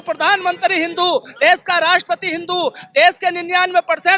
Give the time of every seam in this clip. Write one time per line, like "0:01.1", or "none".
none